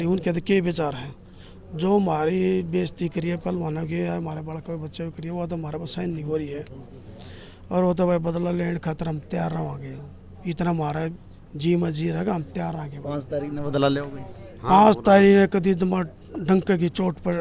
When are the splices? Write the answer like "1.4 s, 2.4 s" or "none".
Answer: none

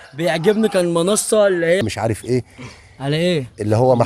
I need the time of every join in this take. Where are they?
1.8 s

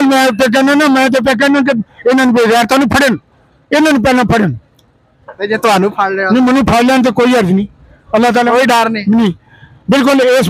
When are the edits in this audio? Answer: none

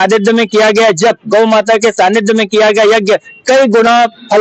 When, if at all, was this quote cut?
none

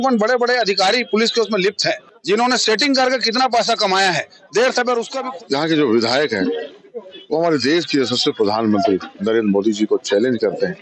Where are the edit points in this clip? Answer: 2.1 s, 5.1 s

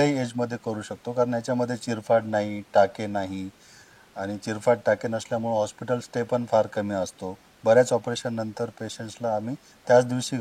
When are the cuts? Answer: none

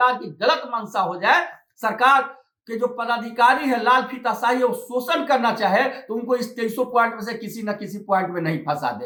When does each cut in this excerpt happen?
none

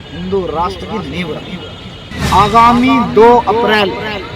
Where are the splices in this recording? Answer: 2.1 s

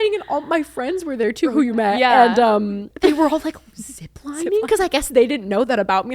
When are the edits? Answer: 1.5 s, 2.9 s

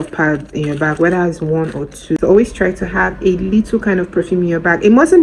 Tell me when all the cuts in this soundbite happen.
2.2 s

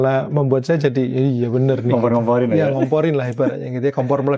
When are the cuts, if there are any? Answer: none

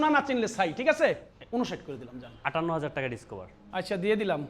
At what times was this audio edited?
1.0 s

